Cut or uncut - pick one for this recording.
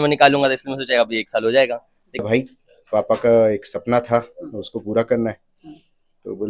cut